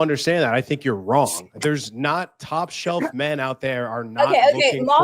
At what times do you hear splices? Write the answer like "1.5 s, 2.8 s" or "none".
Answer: 1.4 s